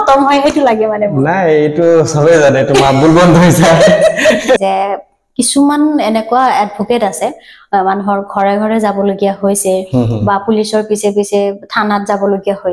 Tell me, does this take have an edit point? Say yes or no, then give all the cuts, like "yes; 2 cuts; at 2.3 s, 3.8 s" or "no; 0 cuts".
yes; 1 cut; at 4.6 s